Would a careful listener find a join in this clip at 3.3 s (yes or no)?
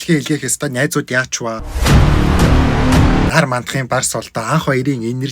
yes